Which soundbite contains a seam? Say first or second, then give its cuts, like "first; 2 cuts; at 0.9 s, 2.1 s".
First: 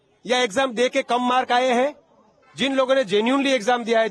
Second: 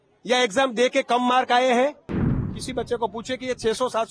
second; 1 cut; at 2.5 s